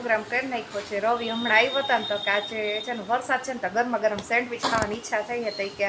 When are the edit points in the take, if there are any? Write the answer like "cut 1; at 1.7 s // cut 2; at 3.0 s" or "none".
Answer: none